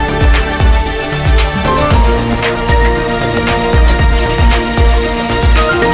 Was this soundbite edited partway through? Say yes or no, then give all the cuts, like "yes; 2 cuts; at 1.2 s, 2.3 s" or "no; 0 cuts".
no; 0 cuts